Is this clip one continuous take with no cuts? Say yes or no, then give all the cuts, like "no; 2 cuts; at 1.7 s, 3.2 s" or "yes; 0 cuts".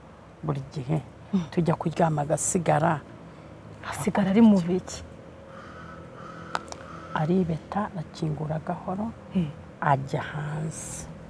yes; 0 cuts